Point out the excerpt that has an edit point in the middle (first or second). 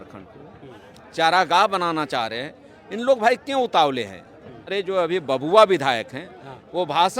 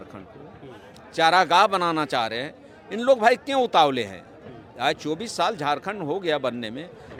first